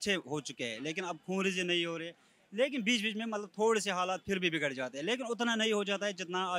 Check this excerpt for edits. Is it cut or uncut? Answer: uncut